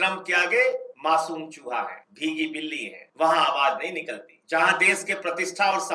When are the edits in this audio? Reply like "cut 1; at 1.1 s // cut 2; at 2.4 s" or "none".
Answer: cut 1; at 0.9 s // cut 2; at 2.0 s // cut 3; at 3.0 s // cut 4; at 4.3 s